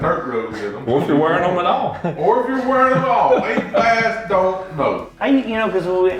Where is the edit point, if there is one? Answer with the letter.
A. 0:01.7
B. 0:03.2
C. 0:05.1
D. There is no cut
C